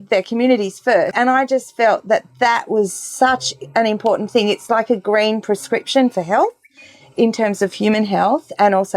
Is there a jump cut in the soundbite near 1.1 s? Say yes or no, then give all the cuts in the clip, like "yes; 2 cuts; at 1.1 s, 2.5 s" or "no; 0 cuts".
yes; 1 cut; at 1.1 s